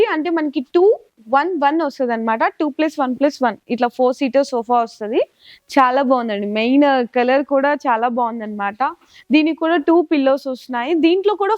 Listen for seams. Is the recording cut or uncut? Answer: uncut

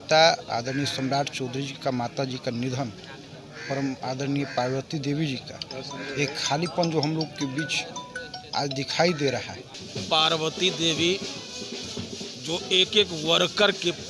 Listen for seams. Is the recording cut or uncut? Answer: cut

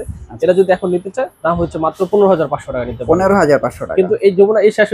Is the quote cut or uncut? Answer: uncut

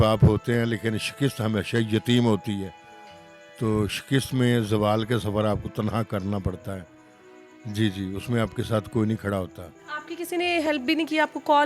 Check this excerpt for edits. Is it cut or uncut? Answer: uncut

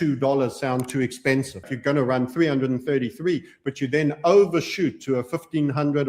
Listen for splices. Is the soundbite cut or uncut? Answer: cut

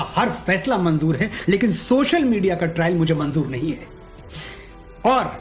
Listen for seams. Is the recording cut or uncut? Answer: uncut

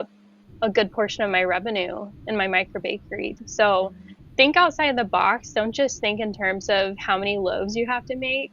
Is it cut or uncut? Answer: cut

